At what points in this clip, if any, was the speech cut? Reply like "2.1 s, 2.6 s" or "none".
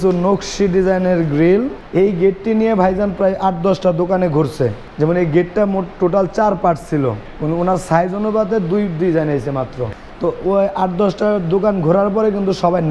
1.8 s, 4.8 s, 7.3 s, 9.9 s